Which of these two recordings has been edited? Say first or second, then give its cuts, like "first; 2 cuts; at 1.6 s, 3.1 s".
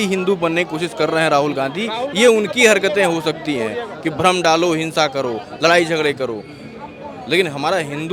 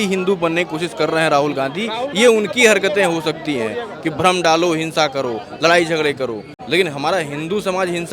second; 1 cut; at 6.5 s